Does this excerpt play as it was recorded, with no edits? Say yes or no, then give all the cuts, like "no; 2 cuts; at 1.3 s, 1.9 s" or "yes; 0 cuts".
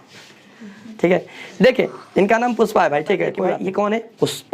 no; 1 cut; at 3.5 s